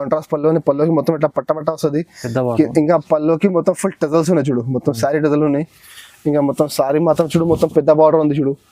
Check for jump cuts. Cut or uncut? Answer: uncut